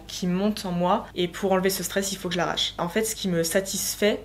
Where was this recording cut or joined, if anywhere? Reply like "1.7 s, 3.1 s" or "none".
1.1 s, 2.8 s